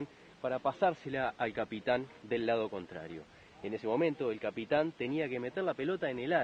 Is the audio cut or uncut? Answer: uncut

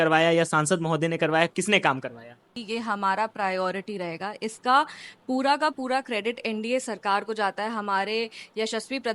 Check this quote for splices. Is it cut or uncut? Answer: cut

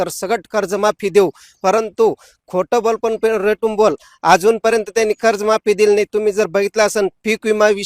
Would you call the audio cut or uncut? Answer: uncut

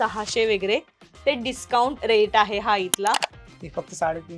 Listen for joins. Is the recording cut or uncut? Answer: cut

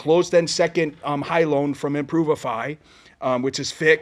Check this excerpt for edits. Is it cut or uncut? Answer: uncut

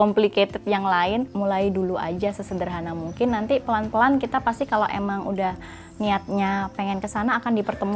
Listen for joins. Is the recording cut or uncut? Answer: cut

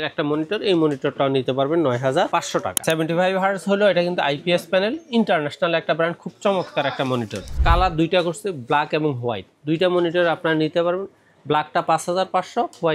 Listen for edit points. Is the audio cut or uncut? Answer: cut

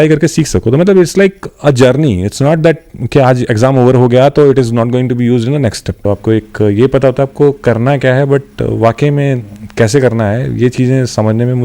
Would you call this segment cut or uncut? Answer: cut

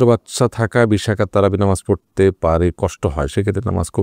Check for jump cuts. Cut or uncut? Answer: uncut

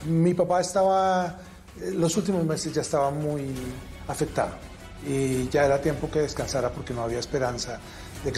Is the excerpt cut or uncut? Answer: uncut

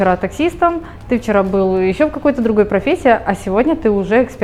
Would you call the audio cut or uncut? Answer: uncut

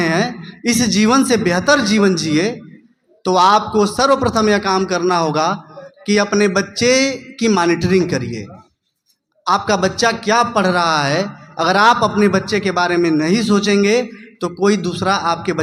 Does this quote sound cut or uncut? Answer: uncut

